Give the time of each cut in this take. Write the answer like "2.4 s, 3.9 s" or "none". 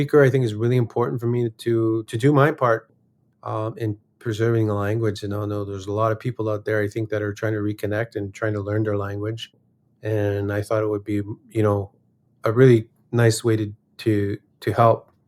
2.1 s